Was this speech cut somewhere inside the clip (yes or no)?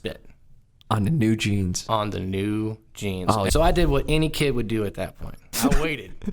yes